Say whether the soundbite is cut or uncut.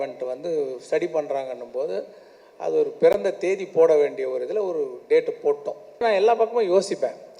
cut